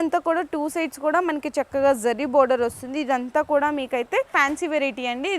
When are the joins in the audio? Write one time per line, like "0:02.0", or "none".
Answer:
0:04.3